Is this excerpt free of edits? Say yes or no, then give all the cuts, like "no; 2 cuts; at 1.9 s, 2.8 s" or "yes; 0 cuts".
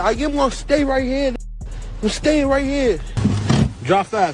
no; 1 cut; at 3.1 s